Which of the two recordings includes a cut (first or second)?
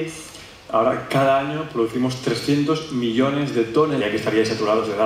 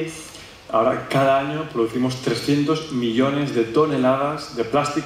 second